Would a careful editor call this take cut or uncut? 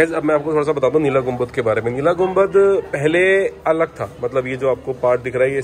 uncut